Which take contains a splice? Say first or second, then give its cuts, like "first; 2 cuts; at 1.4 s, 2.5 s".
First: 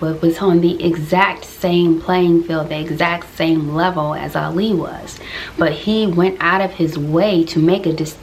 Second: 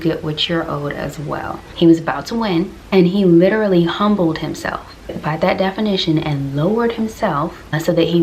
second; 1 cut; at 1.7 s